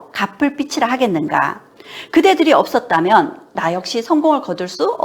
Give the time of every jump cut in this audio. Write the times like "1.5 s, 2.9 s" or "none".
3.5 s

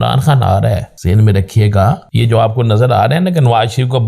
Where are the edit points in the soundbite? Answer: 0.9 s, 2.1 s

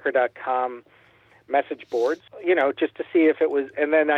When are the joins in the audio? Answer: 2.3 s

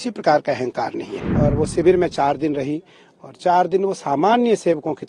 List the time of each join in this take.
1.2 s

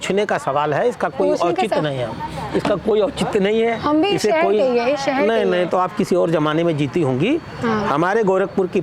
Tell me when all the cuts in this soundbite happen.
none

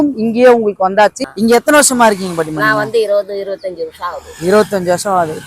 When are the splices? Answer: 1.2 s

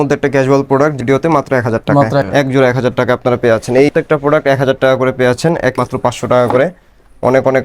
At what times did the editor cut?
1.0 s, 2.3 s, 3.9 s, 5.8 s

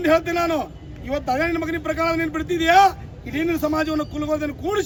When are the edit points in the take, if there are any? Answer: none

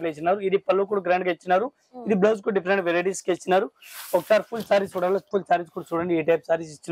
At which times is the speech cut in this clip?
none

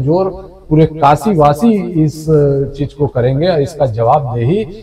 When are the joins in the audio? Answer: none

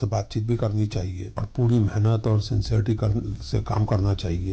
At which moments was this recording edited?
1.4 s

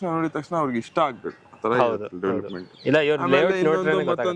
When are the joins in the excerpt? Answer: none

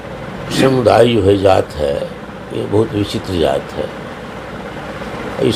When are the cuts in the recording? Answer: none

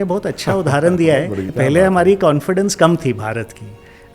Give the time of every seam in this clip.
1.5 s

